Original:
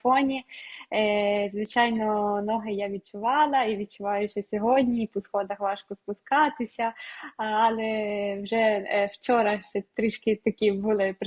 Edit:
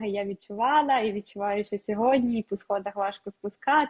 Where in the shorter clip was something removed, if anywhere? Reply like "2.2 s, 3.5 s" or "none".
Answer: none